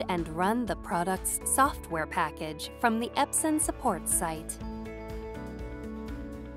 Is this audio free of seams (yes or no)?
no